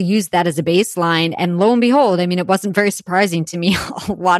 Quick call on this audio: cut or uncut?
uncut